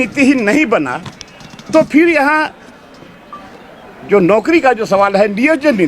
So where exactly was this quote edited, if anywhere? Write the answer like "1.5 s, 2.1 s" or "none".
none